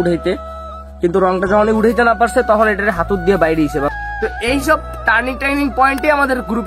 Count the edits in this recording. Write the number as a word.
one